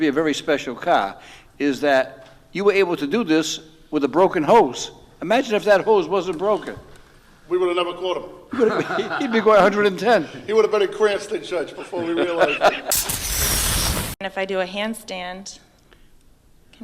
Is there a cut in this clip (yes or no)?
yes